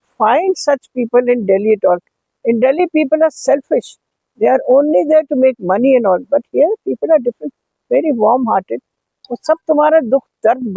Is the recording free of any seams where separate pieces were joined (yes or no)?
yes